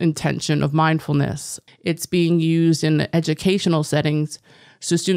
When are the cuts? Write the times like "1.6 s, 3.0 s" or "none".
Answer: 1.6 s

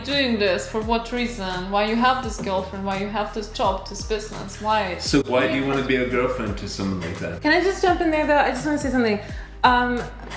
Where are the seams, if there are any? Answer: none

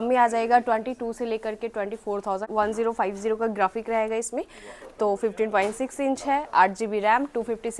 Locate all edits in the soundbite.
2.5 s

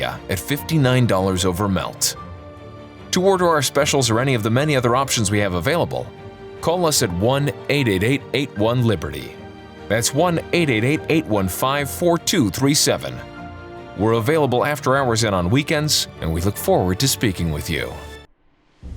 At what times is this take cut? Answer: 18.0 s

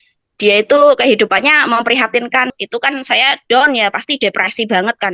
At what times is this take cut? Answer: 2.5 s

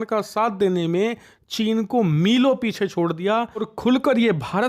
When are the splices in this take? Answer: 3.6 s

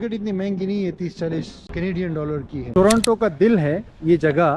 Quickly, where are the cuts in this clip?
1.6 s, 2.6 s

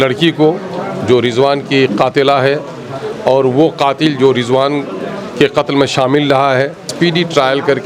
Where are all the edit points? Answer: 6.9 s

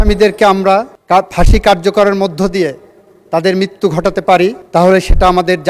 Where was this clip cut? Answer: 1.0 s, 4.6 s

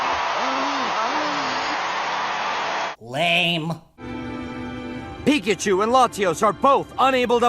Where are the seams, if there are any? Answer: 1.3 s

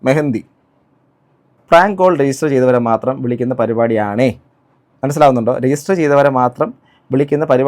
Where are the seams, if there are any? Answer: 1.5 s

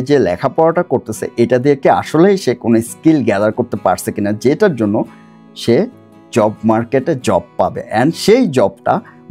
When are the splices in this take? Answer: none

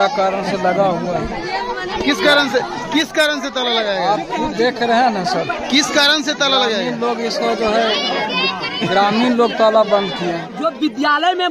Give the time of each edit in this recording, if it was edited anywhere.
10.5 s

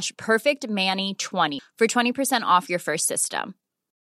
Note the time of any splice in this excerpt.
1.6 s

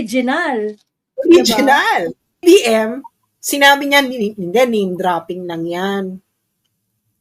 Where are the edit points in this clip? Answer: 2.4 s

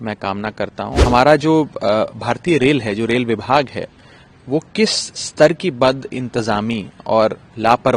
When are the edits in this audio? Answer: 1.0 s

